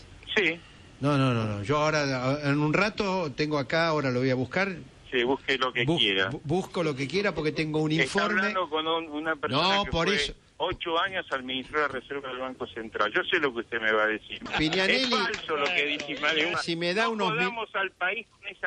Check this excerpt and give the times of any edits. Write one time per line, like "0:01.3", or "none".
none